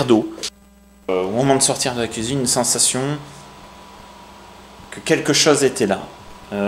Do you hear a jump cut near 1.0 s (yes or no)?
yes